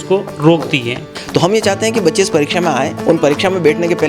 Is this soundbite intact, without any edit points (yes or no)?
no